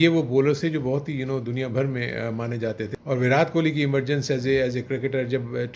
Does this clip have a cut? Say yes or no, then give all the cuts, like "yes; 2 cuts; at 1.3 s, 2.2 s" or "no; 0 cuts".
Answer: yes; 1 cut; at 2.9 s